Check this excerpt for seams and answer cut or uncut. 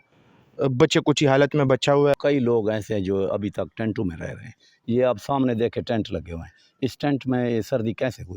cut